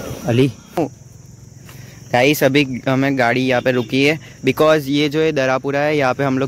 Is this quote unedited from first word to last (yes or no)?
yes